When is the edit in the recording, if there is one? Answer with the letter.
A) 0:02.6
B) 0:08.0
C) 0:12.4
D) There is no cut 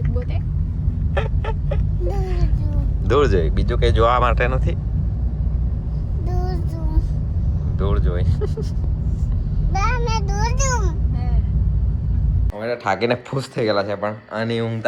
C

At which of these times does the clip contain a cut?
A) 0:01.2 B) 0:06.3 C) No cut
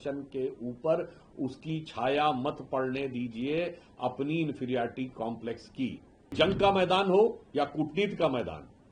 B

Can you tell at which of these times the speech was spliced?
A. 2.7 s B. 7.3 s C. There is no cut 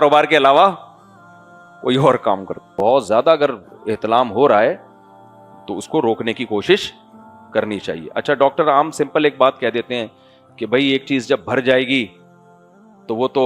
A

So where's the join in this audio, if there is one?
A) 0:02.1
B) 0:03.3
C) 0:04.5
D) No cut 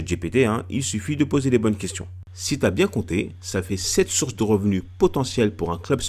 A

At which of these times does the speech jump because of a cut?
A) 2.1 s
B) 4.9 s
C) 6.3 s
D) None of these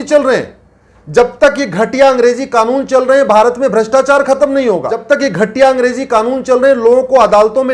B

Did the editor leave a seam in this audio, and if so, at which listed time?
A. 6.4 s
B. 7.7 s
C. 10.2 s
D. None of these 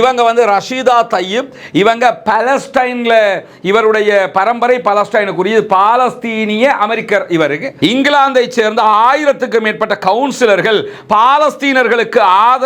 B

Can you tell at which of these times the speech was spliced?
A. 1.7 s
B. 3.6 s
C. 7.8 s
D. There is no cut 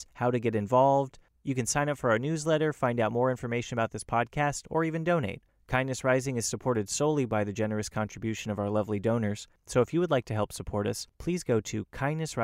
D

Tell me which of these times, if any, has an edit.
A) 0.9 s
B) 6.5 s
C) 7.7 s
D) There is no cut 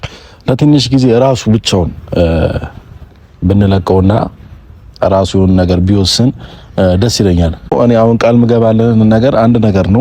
C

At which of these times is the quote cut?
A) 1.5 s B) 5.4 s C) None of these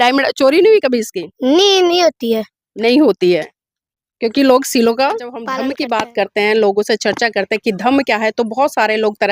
B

